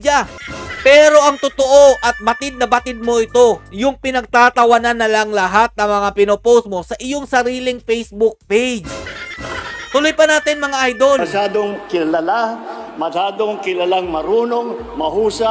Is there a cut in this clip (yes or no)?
no